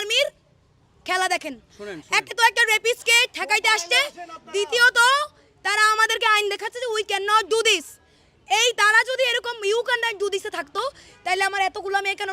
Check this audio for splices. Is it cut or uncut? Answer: uncut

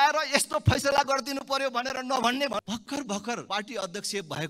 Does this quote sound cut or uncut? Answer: cut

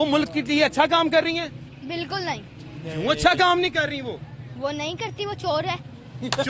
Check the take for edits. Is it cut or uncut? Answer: uncut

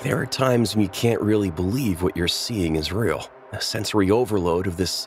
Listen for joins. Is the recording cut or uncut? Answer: uncut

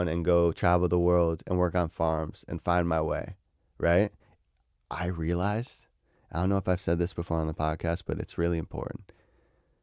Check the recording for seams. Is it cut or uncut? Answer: uncut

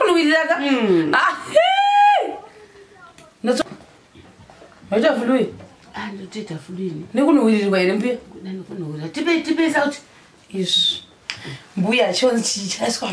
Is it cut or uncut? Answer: cut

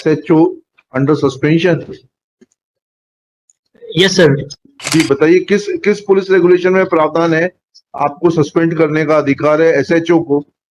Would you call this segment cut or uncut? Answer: cut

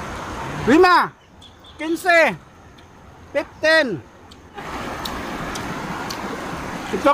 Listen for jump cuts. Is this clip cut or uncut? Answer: cut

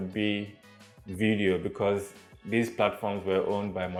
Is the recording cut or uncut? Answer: uncut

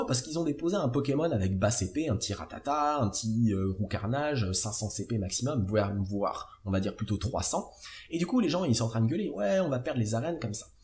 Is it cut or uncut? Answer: uncut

